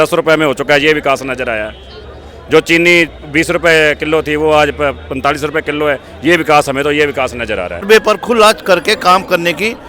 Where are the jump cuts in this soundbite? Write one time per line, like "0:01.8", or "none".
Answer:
0:07.9